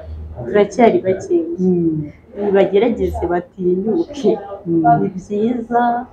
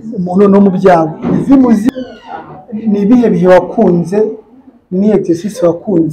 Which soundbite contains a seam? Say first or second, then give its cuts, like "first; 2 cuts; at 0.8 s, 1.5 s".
second; 1 cut; at 1.9 s